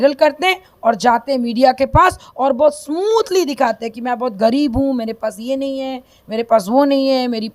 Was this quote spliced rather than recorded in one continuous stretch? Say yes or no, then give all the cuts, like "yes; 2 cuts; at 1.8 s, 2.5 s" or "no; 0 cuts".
no; 0 cuts